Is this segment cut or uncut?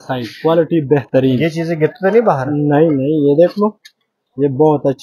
uncut